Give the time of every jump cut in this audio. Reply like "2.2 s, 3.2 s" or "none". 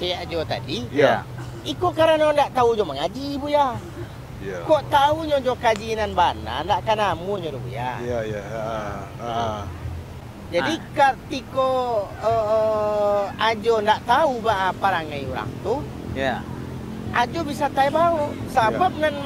none

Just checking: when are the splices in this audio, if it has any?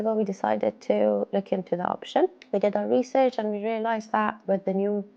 2.4 s, 4.4 s

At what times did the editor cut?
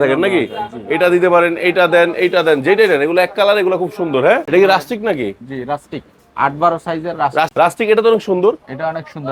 4.4 s, 7.5 s

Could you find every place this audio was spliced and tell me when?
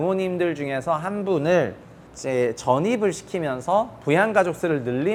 none

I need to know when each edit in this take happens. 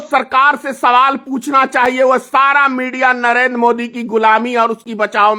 none

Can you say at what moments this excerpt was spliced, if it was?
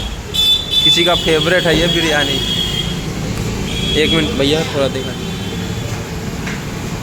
none

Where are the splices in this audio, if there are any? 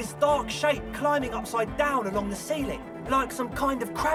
none

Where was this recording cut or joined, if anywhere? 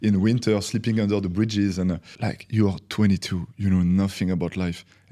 2.1 s

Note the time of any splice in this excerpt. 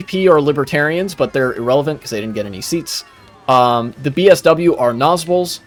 none

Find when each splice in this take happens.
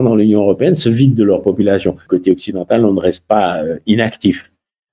2.0 s

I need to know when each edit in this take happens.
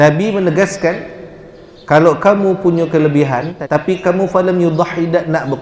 3.5 s

